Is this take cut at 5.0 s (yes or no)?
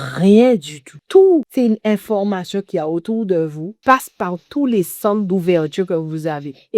no